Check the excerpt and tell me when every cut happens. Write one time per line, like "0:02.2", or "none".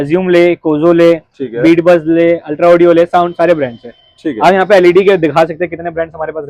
none